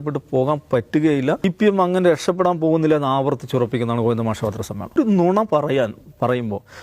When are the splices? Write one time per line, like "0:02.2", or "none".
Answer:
0:01.4
0:04.9